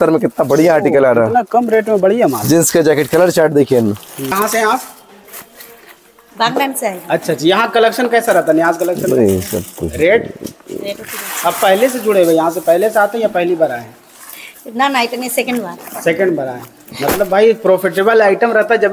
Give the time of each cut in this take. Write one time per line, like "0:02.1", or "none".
0:04.3